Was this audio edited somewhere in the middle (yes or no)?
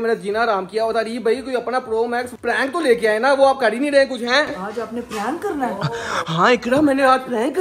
no